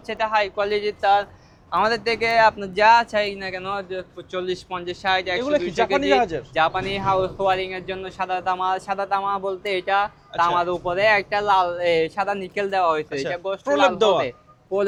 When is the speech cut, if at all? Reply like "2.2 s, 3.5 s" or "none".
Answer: none